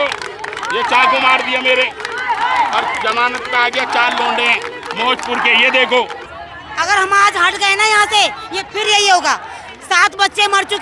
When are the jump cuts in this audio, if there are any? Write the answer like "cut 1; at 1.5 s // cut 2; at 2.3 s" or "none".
cut 1; at 6.3 s